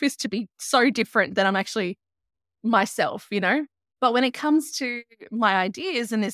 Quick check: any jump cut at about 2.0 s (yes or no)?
no